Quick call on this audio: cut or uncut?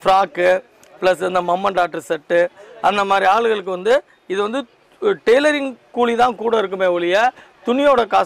uncut